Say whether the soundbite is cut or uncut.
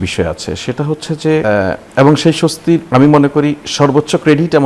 cut